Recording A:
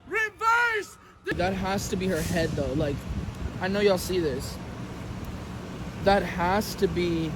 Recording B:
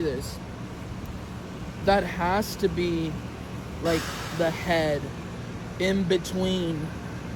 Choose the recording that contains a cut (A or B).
A